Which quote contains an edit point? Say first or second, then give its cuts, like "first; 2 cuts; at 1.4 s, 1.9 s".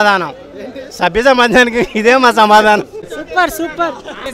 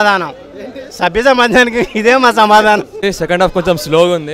second; 1 cut; at 2.9 s